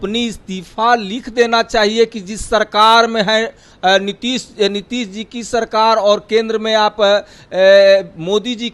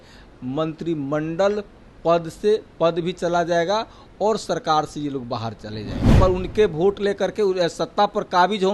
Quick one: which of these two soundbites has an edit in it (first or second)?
second